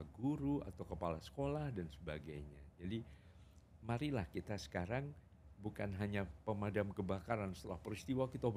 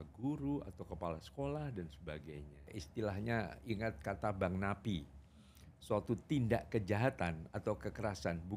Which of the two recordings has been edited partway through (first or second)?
second